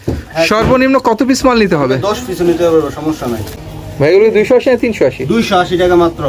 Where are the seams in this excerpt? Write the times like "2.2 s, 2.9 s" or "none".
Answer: 3.6 s